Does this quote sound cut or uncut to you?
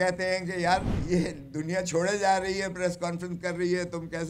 cut